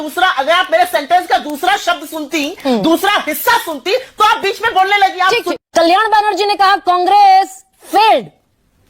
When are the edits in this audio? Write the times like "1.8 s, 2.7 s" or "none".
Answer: 5.5 s